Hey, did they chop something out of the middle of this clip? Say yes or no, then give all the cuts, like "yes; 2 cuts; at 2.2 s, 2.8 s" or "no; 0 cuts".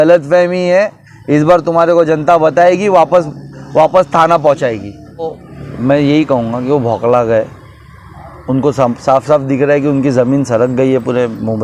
yes; 1 cut; at 5.2 s